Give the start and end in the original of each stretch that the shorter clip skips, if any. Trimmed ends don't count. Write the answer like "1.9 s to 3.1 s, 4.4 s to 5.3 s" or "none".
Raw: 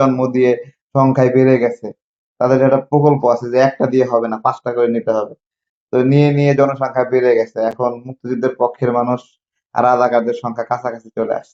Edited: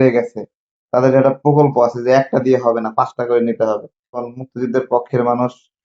5.7 s to 7.9 s